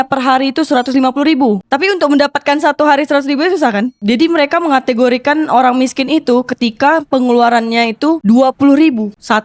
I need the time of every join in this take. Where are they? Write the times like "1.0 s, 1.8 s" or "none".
1.7 s, 4.0 s, 8.2 s